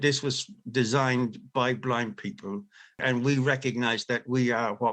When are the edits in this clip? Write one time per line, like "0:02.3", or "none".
0:03.0